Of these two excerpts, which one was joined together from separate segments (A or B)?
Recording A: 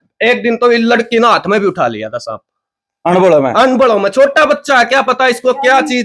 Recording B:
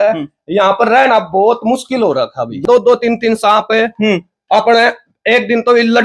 B